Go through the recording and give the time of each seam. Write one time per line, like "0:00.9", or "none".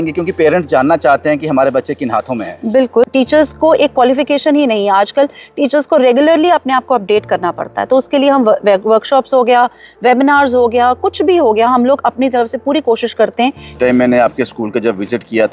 0:03.0
0:13.8